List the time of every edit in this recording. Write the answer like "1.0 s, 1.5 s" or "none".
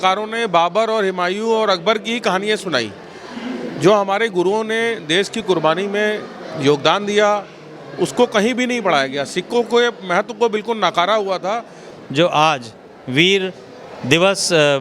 11.9 s